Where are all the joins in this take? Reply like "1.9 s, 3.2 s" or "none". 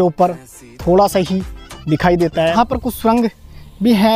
2.5 s